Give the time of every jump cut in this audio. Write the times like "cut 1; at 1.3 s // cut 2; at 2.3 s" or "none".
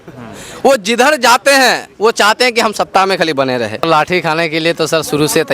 cut 1; at 3.9 s